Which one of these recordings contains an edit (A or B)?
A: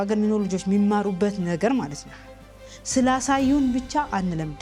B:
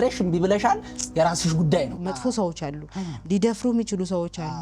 B